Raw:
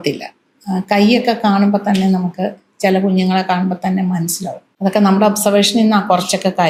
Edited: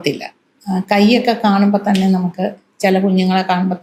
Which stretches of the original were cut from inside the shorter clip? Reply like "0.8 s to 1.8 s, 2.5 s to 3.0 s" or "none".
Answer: none